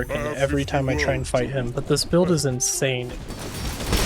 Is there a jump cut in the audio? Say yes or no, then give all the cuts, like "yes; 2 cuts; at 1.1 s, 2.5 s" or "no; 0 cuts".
yes; 1 cut; at 3.1 s